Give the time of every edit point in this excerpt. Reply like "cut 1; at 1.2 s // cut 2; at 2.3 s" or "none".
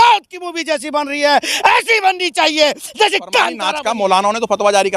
cut 1; at 3.7 s